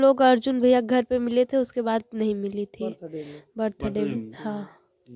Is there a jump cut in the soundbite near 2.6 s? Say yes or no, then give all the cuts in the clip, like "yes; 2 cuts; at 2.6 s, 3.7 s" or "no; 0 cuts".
no; 0 cuts